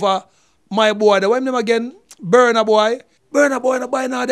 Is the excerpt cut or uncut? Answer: cut